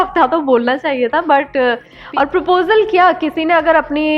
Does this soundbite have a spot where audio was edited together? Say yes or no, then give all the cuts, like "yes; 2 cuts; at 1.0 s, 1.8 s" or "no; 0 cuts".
yes; 1 cut; at 1.9 s